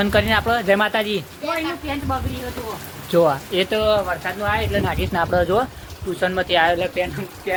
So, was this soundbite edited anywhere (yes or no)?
no